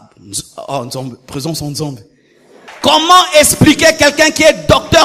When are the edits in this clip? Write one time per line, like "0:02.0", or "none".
0:02.7